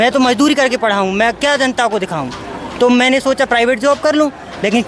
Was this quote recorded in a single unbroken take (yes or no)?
yes